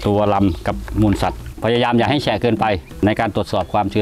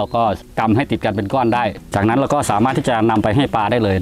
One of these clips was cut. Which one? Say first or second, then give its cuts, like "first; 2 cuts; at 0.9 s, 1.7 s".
first; 2 cuts; at 1.4 s, 3.0 s